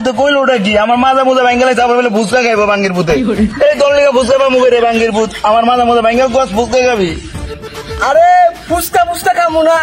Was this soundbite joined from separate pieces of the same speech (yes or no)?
no